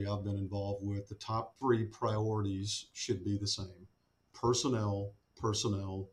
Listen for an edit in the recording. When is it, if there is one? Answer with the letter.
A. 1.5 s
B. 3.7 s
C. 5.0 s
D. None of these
A